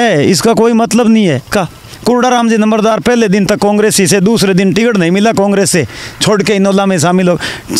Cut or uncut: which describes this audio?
cut